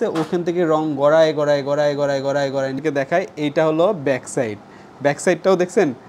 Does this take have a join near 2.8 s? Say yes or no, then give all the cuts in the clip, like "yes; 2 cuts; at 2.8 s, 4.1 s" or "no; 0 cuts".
yes; 1 cut; at 2.8 s